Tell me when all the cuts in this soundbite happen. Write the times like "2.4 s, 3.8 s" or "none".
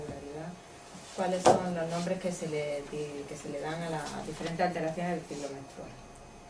1.9 s